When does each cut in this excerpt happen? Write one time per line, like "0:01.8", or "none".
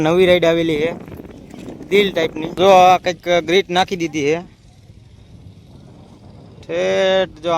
0:02.6

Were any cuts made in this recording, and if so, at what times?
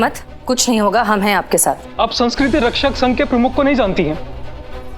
0:01.9

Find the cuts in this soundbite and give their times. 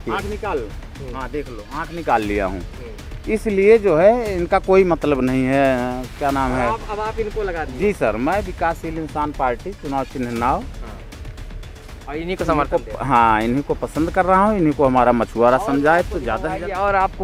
none

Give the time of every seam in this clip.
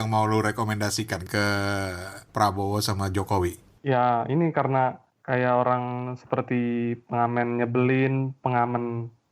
0:01.2
0:02.3
0:03.6
0:05.1

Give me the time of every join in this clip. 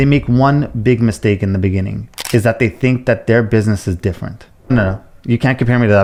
none

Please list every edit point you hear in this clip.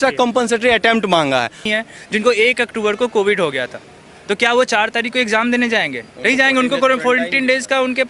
0:01.7

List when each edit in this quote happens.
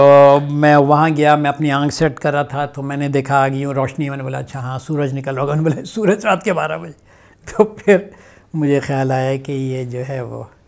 none

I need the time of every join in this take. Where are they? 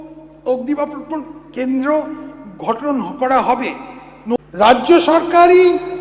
0:04.4

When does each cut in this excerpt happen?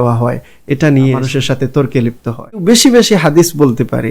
0:01.2
0:02.6

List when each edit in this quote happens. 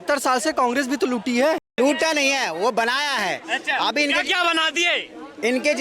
0:01.8

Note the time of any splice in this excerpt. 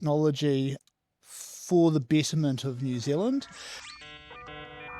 0:04.0

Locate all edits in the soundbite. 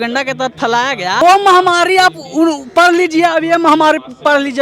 0:01.2

